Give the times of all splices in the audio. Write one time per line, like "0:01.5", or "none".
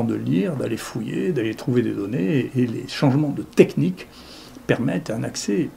none